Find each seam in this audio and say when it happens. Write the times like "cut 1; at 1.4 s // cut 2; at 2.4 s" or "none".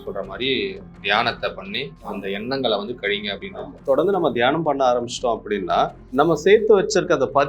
cut 1; at 2.0 s // cut 2; at 3.7 s // cut 3; at 6.0 s